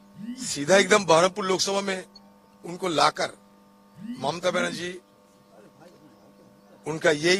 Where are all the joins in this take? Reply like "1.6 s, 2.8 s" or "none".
none

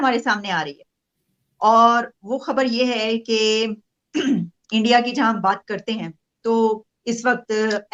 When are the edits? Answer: none

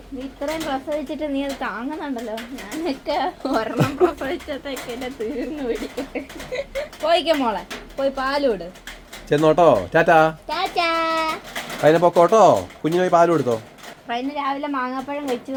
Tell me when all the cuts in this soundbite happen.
none

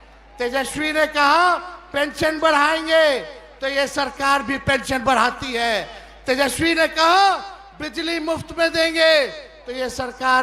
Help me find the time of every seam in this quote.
none

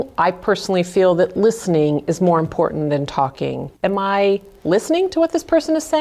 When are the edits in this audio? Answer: 3.7 s

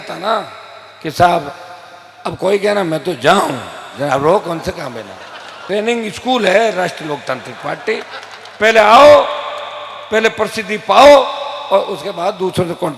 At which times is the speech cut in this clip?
5.6 s

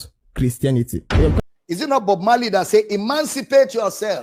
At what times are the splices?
none

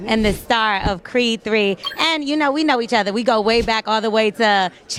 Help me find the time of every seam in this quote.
none

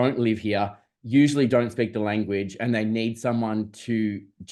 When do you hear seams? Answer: none

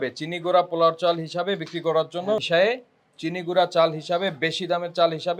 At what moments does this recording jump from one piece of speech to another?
2.4 s

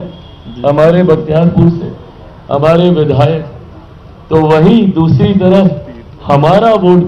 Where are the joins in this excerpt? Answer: none

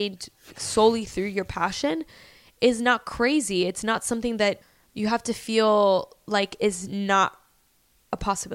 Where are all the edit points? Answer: 4.6 s

